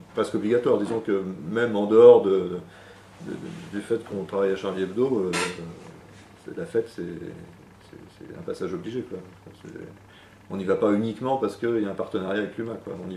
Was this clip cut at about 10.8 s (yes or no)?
yes